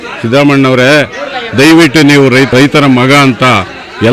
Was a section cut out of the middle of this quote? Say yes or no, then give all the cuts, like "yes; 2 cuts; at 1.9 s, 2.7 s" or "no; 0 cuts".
yes; 1 cut; at 2.5 s